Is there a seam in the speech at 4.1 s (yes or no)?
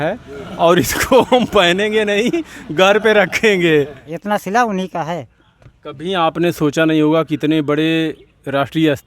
yes